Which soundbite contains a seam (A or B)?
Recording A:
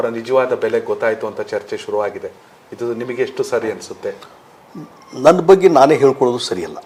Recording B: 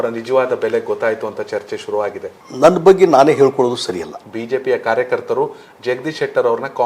B